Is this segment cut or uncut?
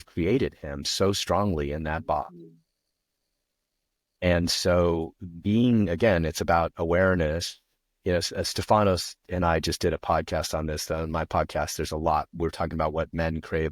uncut